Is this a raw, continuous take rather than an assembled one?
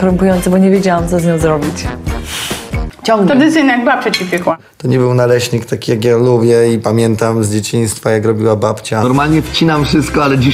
no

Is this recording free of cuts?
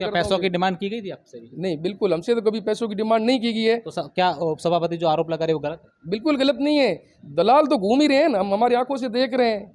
yes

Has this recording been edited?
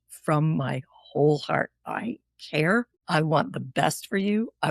yes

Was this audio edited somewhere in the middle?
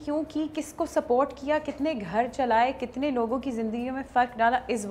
no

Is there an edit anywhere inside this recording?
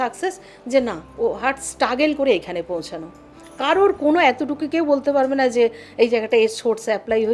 no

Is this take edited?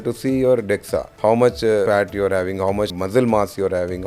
yes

